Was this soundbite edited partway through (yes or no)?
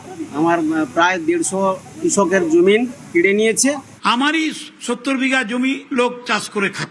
yes